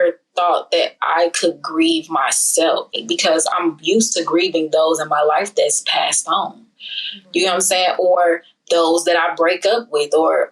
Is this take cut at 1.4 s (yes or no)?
no